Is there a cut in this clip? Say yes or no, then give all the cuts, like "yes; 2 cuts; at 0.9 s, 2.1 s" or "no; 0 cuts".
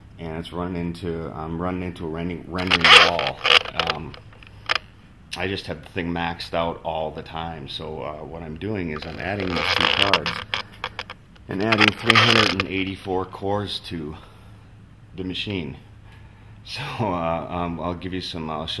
no; 0 cuts